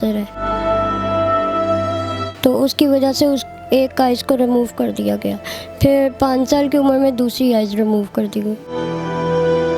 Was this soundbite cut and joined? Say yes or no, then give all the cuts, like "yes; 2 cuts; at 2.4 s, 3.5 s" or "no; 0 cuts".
no; 0 cuts